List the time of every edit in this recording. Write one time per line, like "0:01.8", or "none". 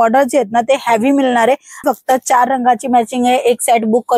0:01.8